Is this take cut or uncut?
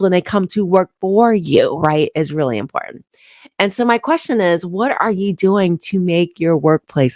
uncut